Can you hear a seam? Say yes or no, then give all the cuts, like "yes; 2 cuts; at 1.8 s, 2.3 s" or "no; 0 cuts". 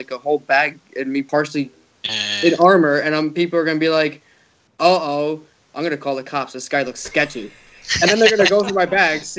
yes; 1 cut; at 1.3 s